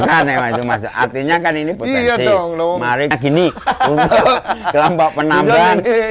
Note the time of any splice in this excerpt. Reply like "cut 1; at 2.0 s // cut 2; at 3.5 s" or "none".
cut 1; at 3.1 s